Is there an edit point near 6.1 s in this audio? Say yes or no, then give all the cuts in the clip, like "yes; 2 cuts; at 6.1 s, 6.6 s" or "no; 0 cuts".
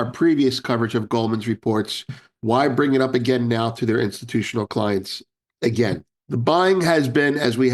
yes; 1 cut; at 6.1 s